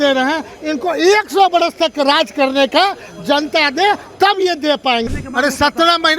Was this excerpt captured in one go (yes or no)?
no